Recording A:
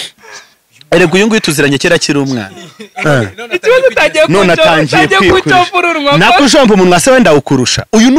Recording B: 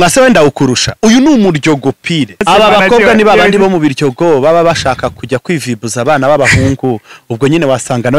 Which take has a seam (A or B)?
B